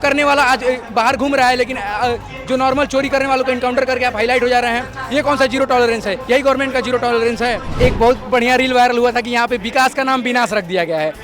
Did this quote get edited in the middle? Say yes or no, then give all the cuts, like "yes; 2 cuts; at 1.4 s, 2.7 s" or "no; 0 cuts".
yes; 1 cut; at 7.7 s